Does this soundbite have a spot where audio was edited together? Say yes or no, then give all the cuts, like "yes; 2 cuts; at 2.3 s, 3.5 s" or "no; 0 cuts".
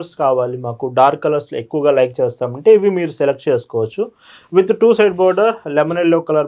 no; 0 cuts